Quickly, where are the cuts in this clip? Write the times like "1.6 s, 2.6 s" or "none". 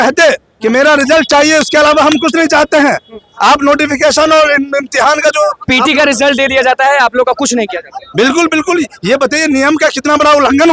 none